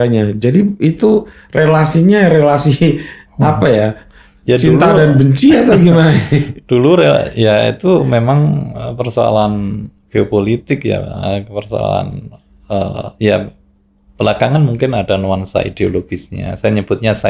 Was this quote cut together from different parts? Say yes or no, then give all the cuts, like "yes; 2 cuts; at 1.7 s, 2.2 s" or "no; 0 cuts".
no; 0 cuts